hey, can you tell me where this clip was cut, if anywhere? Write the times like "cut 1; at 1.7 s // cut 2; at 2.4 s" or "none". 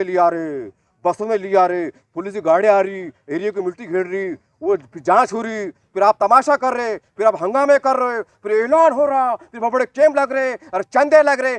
none

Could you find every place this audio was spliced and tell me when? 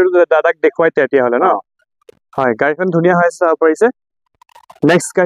none

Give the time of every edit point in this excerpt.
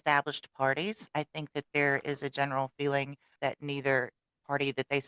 cut 1; at 1.0 s // cut 2; at 3.3 s

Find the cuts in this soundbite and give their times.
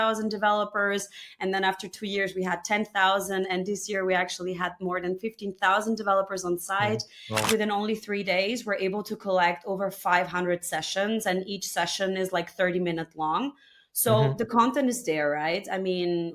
cut 1; at 7.5 s

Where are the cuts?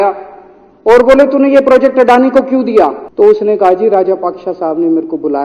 cut 1; at 3.0 s

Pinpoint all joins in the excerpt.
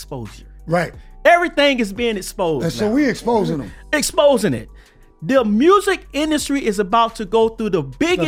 none

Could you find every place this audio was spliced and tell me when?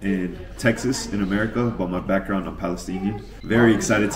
none

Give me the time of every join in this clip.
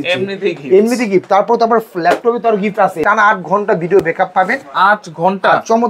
cut 1; at 3.0 s

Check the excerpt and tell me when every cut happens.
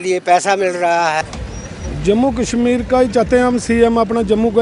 cut 1; at 1.2 s

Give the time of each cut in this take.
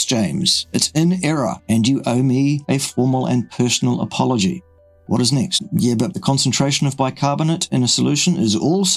cut 1; at 5.6 s

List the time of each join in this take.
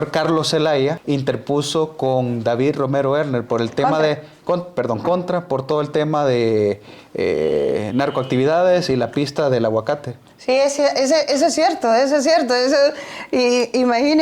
cut 1; at 1.0 s

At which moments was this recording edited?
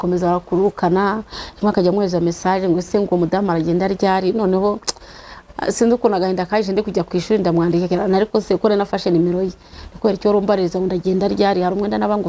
none

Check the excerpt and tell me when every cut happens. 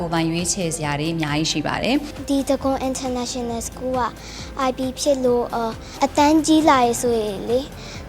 cut 1; at 2.1 s

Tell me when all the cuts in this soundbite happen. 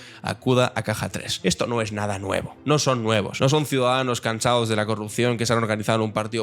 cut 1; at 1.2 s // cut 2; at 2.5 s // cut 3; at 3.3 s

